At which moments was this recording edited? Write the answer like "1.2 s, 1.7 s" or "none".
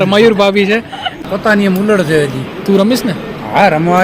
1.2 s

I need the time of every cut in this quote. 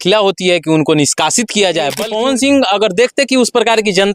2.0 s

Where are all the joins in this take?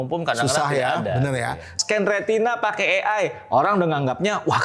1.7 s

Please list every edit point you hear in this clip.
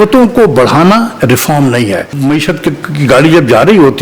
2.1 s

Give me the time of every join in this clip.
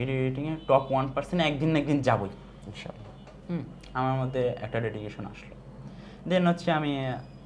none

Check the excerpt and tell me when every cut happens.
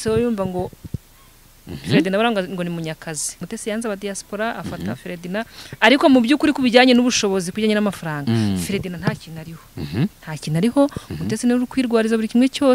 3.4 s

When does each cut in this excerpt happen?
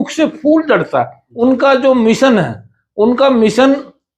1.2 s

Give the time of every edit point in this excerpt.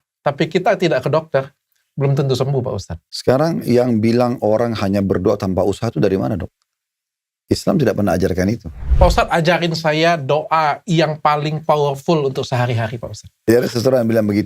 3.2 s, 8.8 s, 13.5 s

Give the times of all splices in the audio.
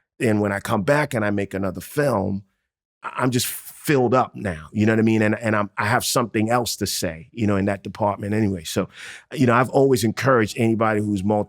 2.8 s

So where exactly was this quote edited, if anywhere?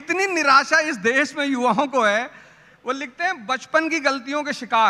none

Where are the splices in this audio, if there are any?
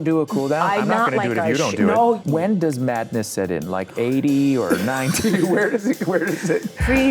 2.2 s

